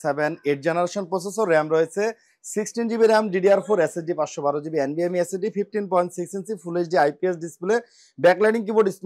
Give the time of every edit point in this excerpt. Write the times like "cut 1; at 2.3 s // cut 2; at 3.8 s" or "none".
none